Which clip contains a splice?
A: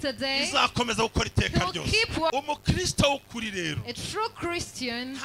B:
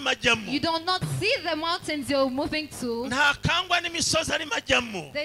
A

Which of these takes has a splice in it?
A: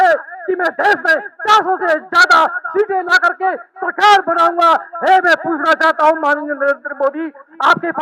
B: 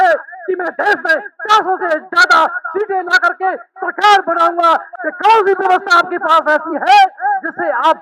B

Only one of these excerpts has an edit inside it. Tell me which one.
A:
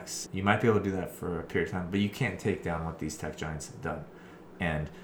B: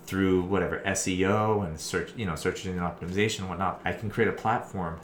B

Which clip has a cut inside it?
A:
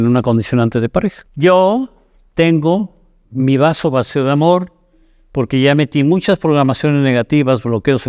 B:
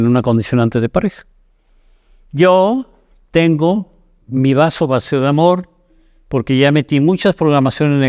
A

